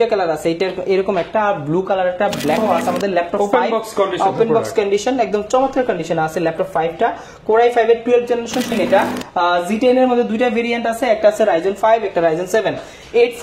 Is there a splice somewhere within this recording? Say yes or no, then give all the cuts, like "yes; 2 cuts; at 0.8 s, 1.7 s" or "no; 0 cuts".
yes; 2 cuts; at 2.6 s, 8.7 s